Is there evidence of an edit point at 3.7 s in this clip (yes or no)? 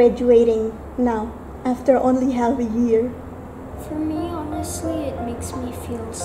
yes